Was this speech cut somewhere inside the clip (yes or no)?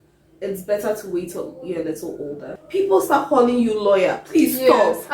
yes